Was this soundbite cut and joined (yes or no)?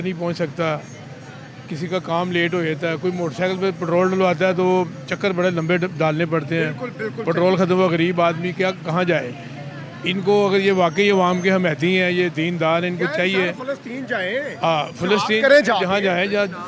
no